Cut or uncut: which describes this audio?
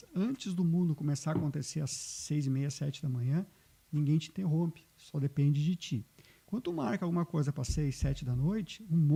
uncut